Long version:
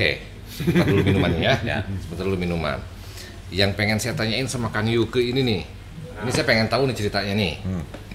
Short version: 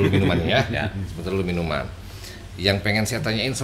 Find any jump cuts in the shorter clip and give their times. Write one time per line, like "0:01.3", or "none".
none

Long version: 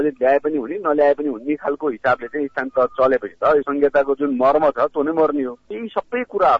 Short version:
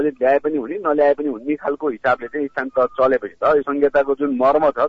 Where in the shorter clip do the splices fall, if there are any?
none

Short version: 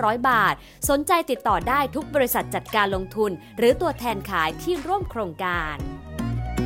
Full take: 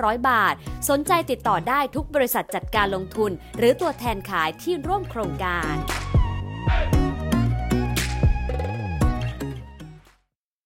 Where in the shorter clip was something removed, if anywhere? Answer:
0:05.6

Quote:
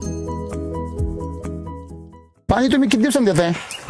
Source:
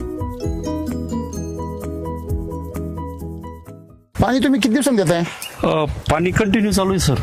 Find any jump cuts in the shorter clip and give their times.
0:02.5

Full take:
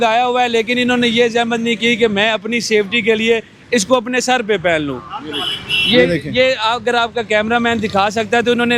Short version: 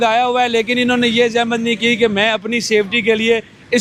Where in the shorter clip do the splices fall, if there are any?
none

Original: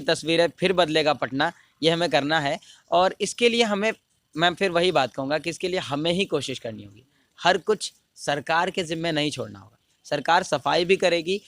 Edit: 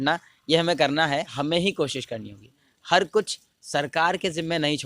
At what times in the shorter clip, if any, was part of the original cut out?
0:01.4

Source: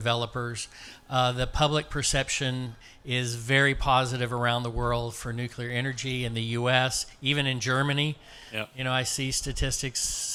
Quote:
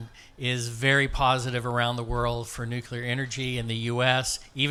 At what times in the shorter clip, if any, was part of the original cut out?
none

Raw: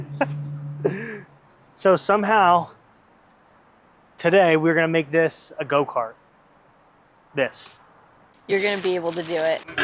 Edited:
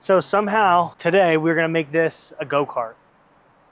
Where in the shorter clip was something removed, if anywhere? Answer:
0:00.9

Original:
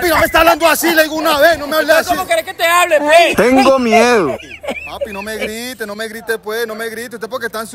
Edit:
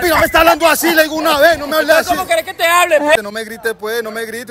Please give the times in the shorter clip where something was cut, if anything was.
0:03.2

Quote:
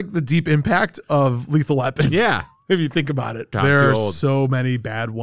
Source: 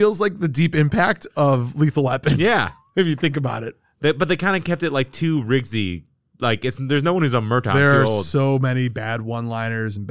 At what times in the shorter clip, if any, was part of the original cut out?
0:03.5

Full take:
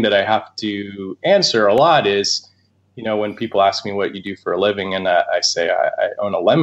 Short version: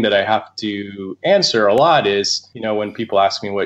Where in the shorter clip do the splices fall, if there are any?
0:02.4

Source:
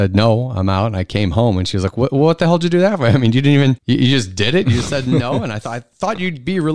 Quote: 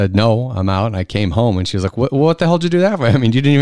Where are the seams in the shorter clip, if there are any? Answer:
none

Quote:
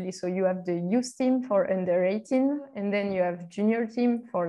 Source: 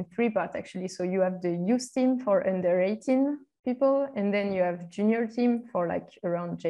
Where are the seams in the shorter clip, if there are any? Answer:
0:02.7

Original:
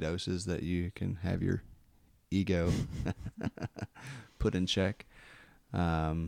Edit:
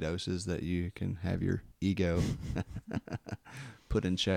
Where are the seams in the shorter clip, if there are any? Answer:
0:01.7

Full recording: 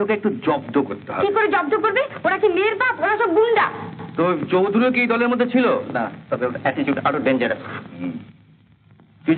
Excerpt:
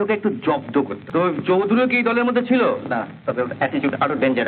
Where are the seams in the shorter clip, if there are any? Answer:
0:01.0

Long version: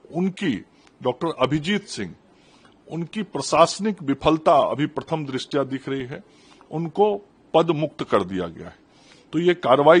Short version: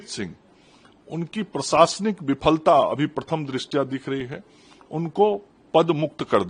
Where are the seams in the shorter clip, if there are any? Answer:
none

